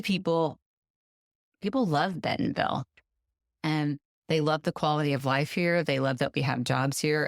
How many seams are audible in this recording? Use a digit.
1